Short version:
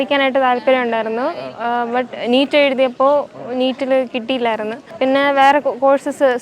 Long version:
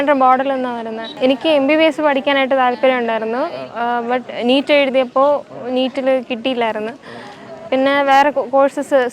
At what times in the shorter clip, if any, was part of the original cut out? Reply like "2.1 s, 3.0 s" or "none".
4.8 s